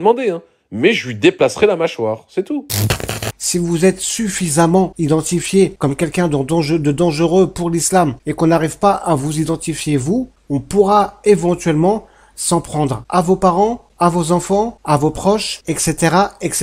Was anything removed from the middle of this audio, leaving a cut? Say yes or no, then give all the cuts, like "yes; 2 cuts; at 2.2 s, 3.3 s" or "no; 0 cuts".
yes; 9 cuts; at 3.0 s, 4.9 s, 5.8 s, 8.2 s, 10.4 s, 13.0 s, 13.9 s, 14.8 s, 15.5 s